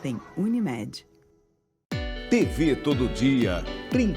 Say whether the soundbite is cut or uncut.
cut